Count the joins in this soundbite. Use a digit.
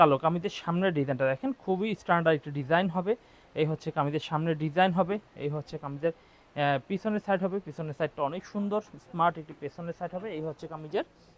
0